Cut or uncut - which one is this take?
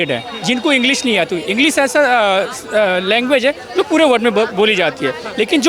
uncut